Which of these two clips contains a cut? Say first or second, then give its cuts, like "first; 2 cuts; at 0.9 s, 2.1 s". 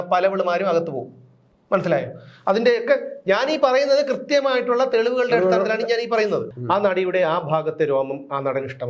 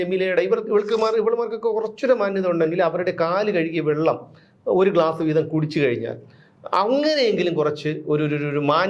first; 1 cut; at 6.5 s